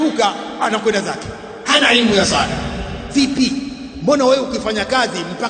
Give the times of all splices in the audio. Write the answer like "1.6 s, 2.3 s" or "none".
3.8 s